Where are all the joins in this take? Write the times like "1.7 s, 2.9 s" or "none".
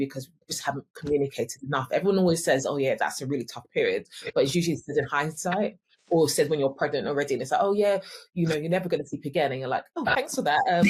none